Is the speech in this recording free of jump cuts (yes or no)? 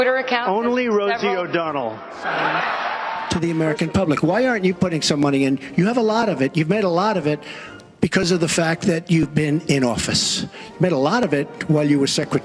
no